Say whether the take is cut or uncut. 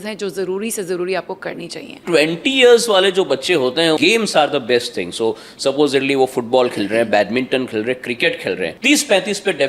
cut